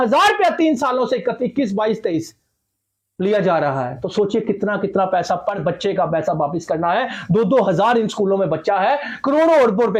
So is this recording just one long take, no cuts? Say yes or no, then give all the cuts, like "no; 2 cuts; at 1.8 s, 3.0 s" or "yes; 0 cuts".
yes; 0 cuts